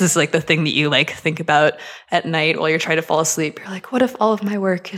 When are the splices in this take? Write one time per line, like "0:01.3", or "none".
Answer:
none